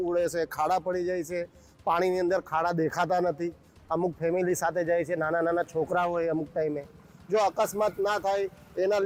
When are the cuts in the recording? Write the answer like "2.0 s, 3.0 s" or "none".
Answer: none

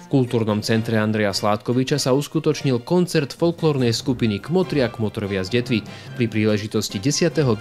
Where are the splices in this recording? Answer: none

